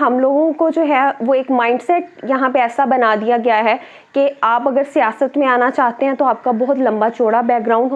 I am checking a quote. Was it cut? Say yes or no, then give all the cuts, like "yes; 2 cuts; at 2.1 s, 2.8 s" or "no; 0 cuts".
no; 0 cuts